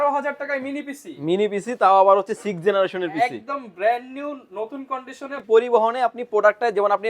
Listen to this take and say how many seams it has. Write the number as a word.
one